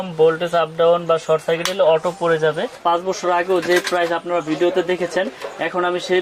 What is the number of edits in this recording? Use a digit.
1